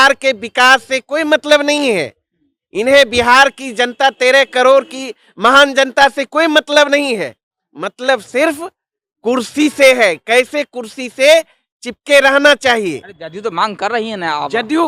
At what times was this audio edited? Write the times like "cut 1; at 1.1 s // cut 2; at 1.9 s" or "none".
none